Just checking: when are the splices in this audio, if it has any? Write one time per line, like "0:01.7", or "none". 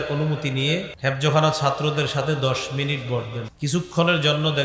0:00.9
0:03.4